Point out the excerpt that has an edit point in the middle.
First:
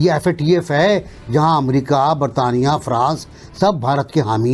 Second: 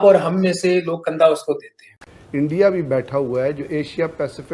second; 1 cut; at 2.2 s

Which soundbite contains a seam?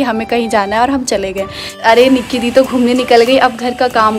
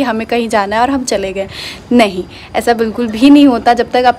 first; 1 cut; at 1.8 s

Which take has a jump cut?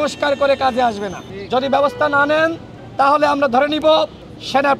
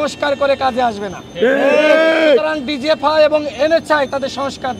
first; 1 cut; at 1.3 s

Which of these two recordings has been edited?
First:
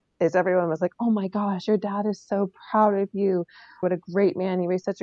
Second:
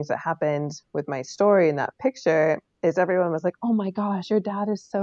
first; 1 cut; at 3.8 s

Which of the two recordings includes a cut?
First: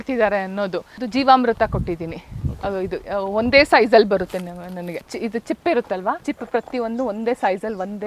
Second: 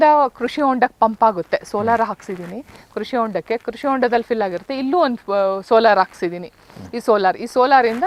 first; 3 cuts; at 1.0 s, 5.1 s, 6.2 s

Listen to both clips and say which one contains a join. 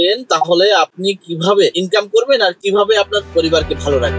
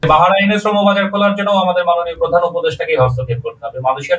first; 2 cuts; at 1.8 s, 3.2 s

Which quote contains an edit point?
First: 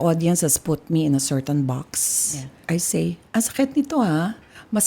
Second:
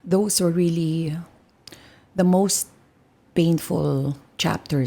first; 1 cut; at 2.6 s

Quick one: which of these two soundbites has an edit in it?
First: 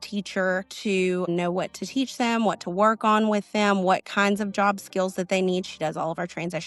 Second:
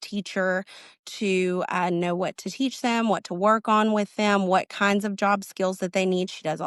first; 1 cut; at 1.2 s

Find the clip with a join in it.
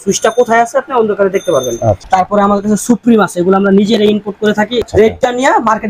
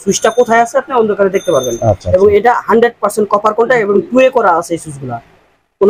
first; 2 cuts; at 2.1 s, 4.8 s

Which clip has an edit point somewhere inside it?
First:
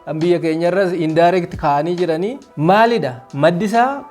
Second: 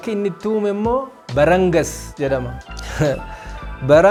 first; 1 cut; at 2.4 s

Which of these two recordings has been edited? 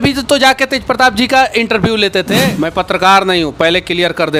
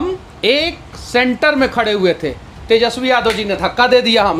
first; 1 cut; at 2.3 s

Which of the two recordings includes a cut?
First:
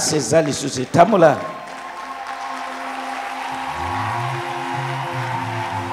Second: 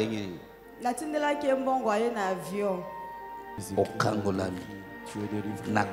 second; 1 cut; at 3.5 s

